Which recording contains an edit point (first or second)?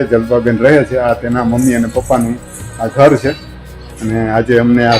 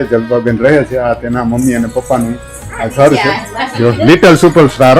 second